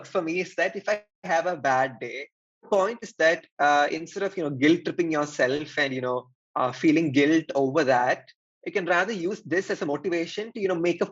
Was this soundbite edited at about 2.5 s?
yes; 1 cut; at 2.5 s

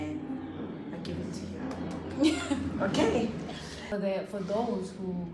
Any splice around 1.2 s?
no; 1 cut; at 3.9 s

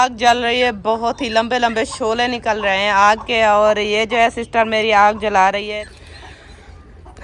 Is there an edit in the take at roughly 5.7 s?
yes; 1 cut; at 5.7 s

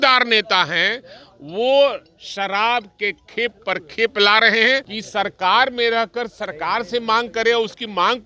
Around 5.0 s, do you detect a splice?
yes; 1 cut; at 5.0 s

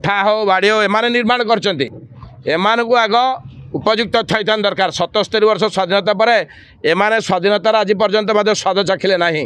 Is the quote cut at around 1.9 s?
no; 0 cuts

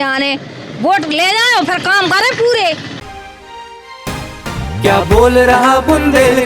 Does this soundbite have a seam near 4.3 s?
no; 1 cut; at 3.0 s

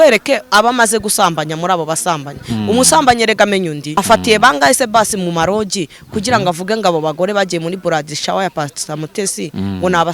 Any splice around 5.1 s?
no; 1 cut; at 3.8 s

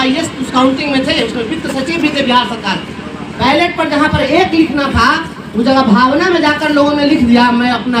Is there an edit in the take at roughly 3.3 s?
yes; 1 cut; at 3.3 s

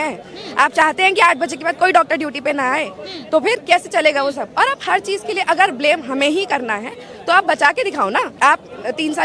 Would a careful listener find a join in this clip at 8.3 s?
yes; 1 cut; at 8.3 s

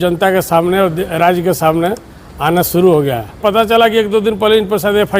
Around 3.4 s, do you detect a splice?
yes; 1 cut; at 3.4 s

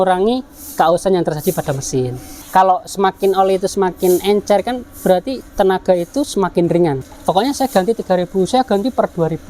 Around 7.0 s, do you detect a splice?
yes; 2 cuts; at 2.4 s, 7.0 s

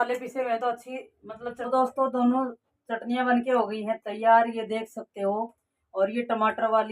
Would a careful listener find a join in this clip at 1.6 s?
yes; 1 cut; at 1.6 s

